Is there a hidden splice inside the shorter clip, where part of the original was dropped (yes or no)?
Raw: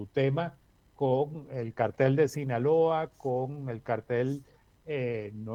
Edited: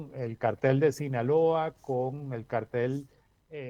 no